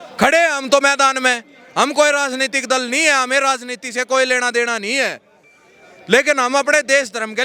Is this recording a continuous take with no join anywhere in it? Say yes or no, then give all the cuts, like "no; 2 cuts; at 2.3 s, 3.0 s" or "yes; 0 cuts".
yes; 0 cuts